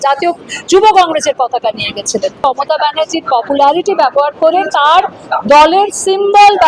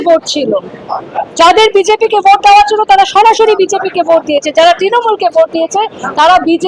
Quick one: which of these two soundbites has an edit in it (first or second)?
first